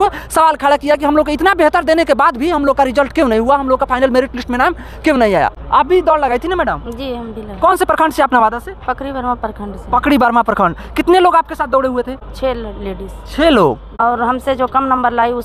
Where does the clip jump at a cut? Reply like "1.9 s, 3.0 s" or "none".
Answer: 13.9 s